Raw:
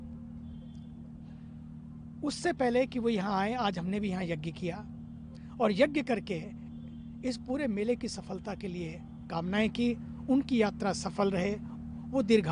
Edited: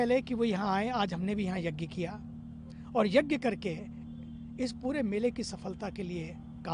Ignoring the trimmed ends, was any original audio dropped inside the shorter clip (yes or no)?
no